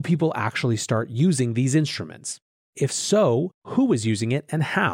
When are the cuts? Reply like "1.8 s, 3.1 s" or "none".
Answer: 2.7 s